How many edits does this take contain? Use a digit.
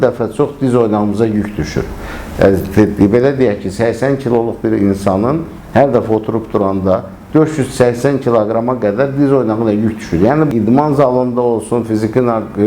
1